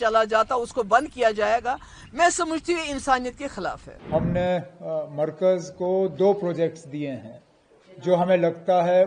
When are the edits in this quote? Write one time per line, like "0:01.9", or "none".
0:03.9